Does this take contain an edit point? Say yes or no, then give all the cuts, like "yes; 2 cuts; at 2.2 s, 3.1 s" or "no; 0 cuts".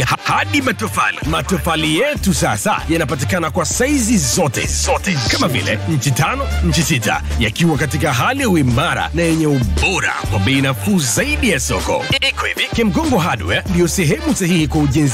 no; 0 cuts